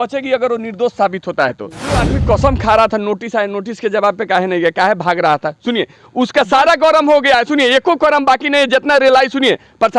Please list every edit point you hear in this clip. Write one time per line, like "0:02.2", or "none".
0:02.0